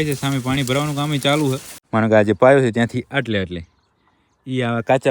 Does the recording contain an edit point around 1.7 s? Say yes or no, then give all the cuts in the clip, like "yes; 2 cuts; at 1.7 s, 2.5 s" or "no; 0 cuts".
yes; 1 cut; at 1.7 s